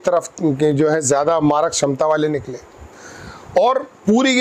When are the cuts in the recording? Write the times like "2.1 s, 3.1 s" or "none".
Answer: none